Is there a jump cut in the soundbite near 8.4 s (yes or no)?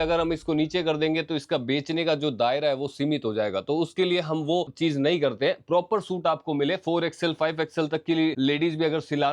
yes